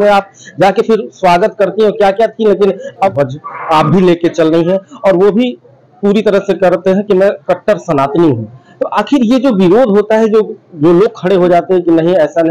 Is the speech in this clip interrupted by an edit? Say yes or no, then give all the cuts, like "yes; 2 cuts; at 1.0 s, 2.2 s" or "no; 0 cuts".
yes; 1 cut; at 3.1 s